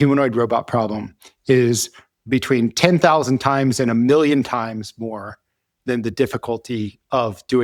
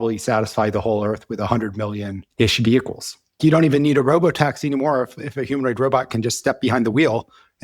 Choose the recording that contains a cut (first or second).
second